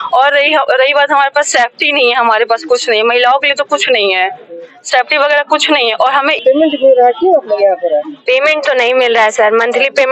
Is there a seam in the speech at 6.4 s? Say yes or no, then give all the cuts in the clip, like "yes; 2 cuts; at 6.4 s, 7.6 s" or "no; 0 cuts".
yes; 1 cut; at 6.4 s